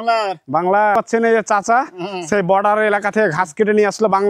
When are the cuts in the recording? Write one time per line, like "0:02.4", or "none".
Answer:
0:01.0